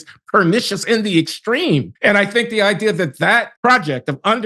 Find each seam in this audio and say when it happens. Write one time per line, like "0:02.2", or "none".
0:01.9
0:03.5